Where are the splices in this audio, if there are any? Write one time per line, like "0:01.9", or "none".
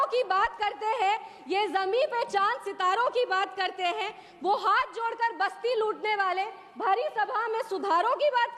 none